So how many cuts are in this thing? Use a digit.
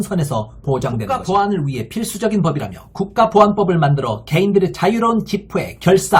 1